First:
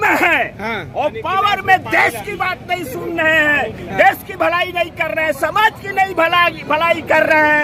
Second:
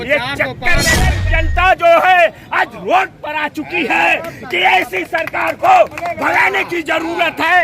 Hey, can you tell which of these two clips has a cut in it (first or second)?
second